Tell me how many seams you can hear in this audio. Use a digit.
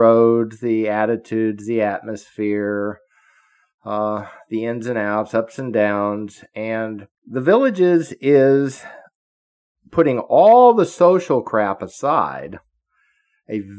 1